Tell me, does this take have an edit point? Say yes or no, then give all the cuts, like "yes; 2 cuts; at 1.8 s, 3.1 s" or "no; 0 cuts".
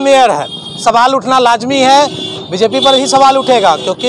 no; 0 cuts